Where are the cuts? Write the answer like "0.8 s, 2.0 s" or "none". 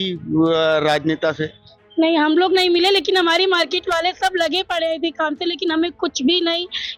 none